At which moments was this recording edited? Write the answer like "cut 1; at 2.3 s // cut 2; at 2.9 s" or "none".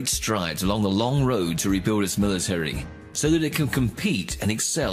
none